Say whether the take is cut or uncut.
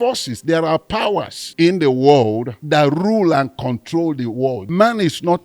cut